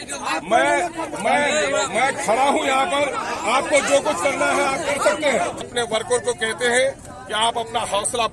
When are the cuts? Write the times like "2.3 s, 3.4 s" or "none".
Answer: 5.7 s

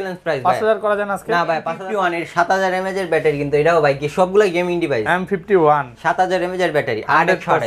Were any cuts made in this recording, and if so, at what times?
1.8 s

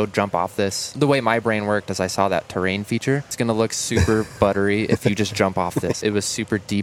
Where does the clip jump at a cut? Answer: 0.9 s, 3.3 s, 6.0 s

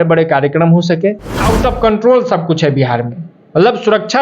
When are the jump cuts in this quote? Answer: 1.3 s

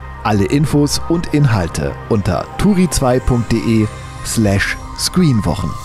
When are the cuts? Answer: none

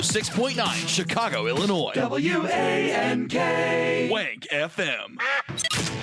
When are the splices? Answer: none

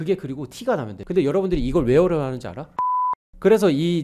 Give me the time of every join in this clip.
1.0 s, 3.1 s

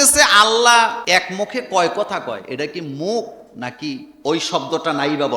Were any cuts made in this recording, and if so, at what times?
1.0 s, 4.1 s

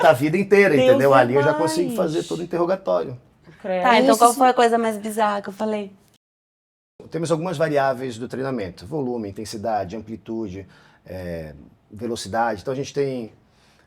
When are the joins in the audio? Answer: 6.6 s

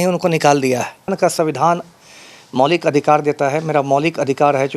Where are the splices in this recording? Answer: 1.1 s

